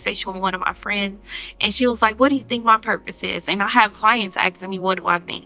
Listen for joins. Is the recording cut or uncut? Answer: uncut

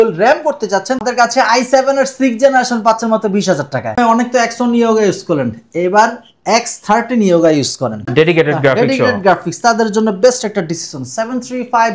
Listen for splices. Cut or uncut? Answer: cut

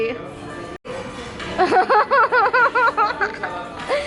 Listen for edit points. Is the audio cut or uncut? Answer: cut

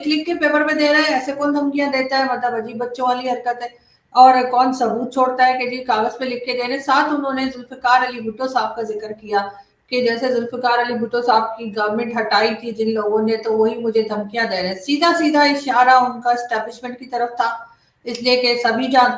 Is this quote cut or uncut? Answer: uncut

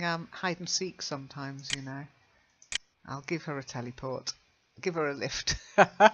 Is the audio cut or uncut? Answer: cut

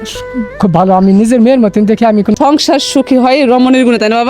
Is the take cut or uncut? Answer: cut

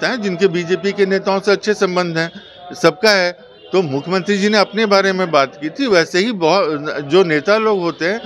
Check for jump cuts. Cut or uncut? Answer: uncut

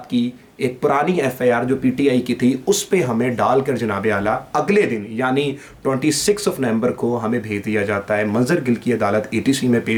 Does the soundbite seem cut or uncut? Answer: uncut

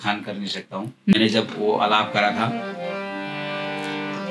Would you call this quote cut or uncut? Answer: cut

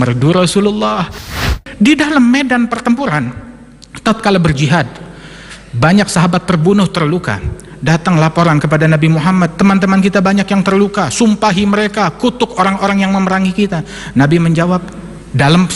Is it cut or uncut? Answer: cut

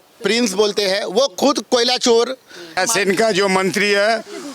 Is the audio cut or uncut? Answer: cut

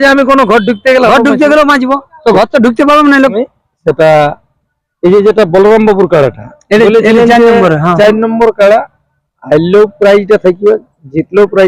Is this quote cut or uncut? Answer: cut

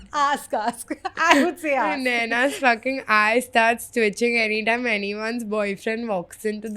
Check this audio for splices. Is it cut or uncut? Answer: uncut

